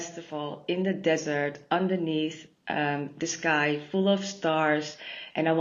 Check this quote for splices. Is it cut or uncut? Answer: uncut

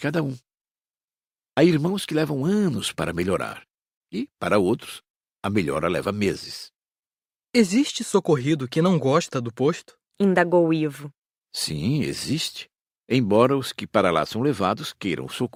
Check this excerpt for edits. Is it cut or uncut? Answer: uncut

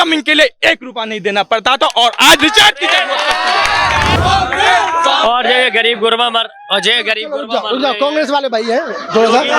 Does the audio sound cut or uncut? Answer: cut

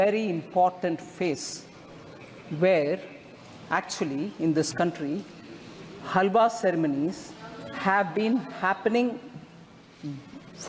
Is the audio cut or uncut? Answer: uncut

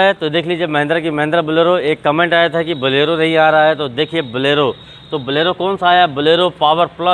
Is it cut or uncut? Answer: uncut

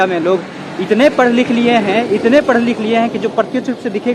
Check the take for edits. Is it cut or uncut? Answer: uncut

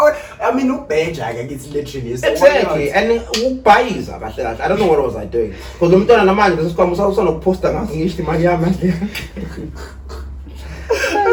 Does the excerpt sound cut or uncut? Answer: uncut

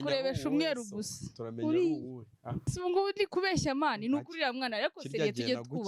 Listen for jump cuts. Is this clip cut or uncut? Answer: cut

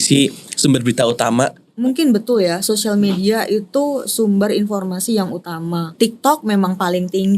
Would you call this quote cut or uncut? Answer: cut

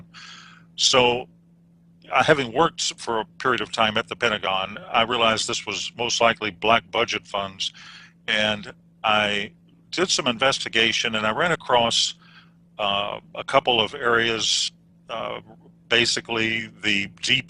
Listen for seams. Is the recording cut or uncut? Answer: uncut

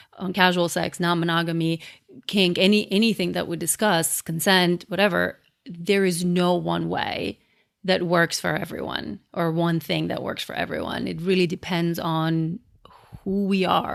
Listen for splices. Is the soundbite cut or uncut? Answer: uncut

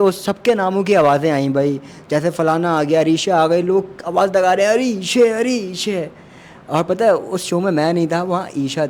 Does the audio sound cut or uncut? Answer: uncut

